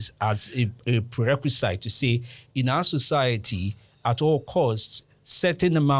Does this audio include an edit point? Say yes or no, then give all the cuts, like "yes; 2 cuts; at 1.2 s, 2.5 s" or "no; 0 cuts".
no; 0 cuts